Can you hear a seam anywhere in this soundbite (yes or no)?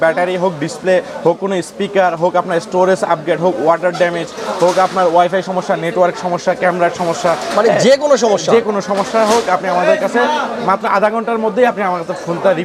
no